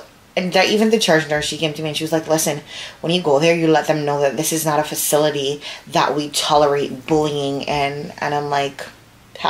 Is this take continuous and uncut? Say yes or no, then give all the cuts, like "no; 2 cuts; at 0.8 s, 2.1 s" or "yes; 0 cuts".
yes; 0 cuts